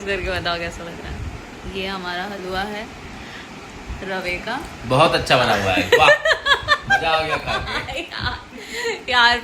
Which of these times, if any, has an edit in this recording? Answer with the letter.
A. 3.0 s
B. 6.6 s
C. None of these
B